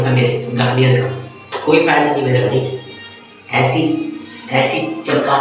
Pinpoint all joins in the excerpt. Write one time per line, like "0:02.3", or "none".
none